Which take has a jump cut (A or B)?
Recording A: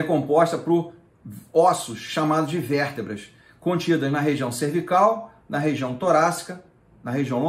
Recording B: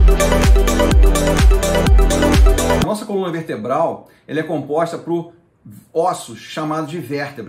B